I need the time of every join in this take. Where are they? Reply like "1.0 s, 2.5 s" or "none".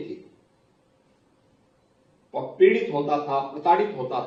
none